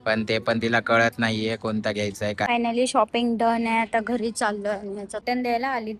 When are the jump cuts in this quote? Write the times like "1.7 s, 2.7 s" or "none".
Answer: 2.5 s, 5.2 s